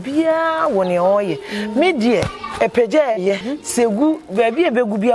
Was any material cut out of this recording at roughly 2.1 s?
no; 1 cut; at 3.5 s

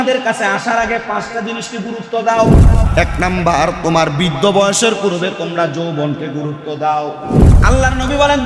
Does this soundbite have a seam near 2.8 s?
yes; 2 cuts; at 2.8 s, 7.6 s

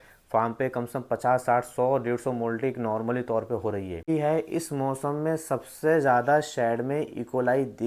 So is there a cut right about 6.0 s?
no; 1 cut; at 4.1 s

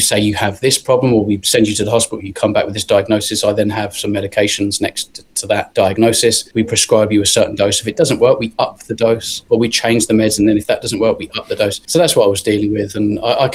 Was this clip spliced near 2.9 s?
no; 0 cuts

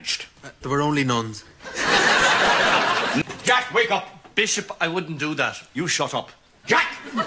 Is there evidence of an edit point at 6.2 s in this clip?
no; 1 cut; at 3.2 s

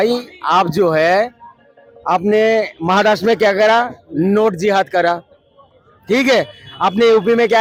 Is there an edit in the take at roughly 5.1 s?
no; 0 cuts

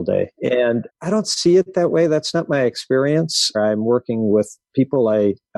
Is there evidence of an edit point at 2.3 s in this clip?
no; 2 cuts; at 0.8 s, 3.6 s

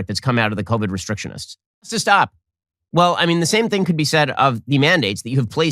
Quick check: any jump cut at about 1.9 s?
yes; 1 cut; at 1.9 s

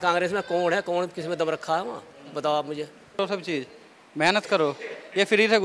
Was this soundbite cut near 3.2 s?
yes; 1 cut; at 3.2 s

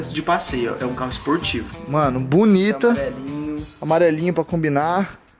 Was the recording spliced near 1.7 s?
yes; 1 cut; at 1.7 s

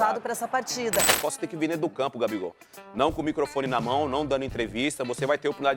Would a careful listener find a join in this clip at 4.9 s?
no; 1 cut; at 1.2 s

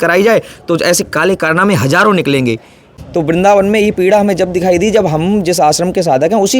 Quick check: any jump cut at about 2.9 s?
yes; 1 cut; at 2.9 s

